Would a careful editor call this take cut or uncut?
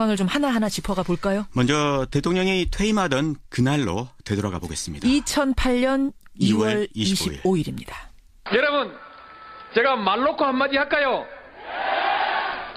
uncut